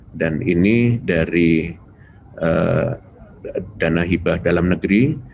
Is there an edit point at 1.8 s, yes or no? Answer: no